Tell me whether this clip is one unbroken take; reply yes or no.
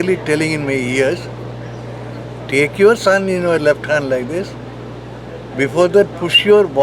yes